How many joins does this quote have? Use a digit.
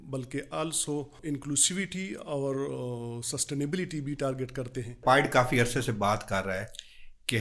2